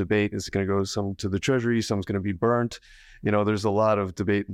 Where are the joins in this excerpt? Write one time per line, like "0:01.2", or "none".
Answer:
none